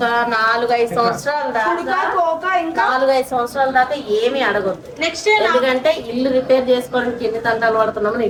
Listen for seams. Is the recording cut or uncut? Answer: uncut